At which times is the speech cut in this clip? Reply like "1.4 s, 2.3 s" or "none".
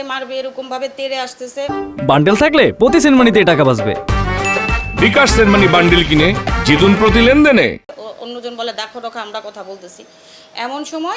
none